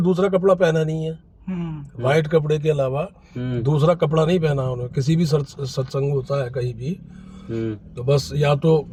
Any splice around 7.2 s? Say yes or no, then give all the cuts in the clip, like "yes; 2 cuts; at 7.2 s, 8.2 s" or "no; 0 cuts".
no; 0 cuts